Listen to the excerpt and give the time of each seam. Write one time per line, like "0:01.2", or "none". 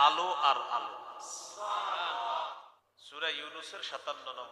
0:02.6